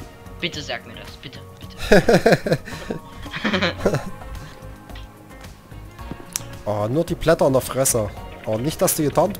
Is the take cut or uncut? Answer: uncut